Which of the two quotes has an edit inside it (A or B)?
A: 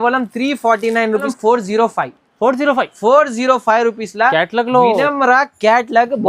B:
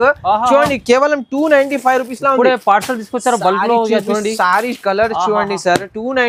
A